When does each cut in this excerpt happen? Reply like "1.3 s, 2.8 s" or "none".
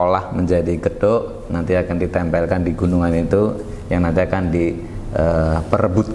none